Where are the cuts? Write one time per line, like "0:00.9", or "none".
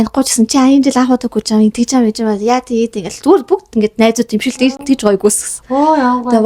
none

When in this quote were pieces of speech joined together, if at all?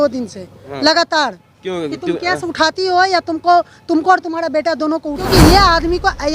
0:05.3

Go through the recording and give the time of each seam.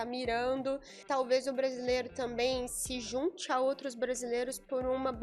0:00.9

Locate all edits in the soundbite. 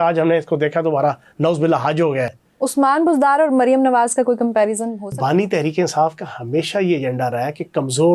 0:02.4
0:05.1

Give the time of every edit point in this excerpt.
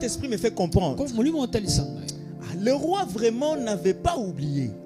none

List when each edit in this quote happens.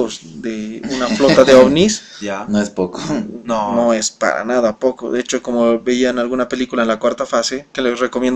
0:04.0

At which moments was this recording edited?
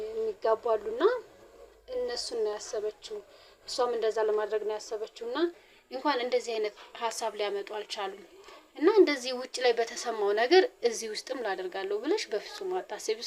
0:05.7

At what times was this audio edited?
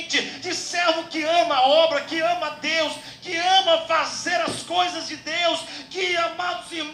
0:03.8

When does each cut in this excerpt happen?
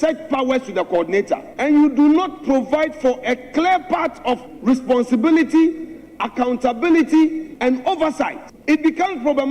0:01.5
0:04.5
0:07.5
0:08.5

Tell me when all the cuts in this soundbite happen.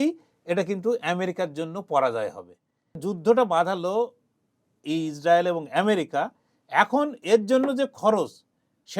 0:03.1

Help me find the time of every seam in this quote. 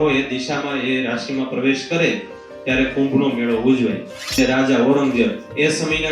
0:04.3

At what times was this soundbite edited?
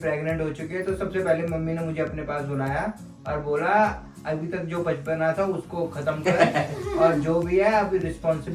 none

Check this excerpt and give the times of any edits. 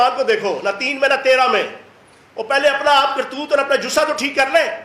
none

